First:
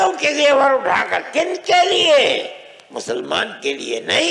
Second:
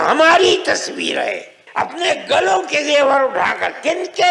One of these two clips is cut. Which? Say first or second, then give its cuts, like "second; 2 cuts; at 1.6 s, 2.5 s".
second; 1 cut; at 1.6 s